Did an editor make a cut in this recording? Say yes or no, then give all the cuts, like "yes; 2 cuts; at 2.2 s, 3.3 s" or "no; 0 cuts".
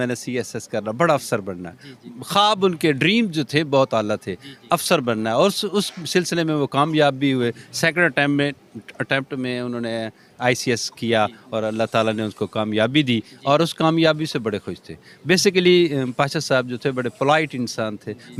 no; 0 cuts